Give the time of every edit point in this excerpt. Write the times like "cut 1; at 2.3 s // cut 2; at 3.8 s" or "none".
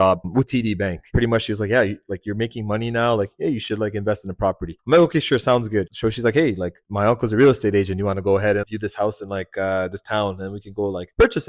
cut 1; at 8.7 s